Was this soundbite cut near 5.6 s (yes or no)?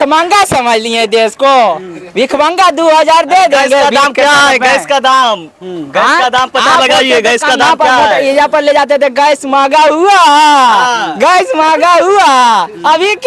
no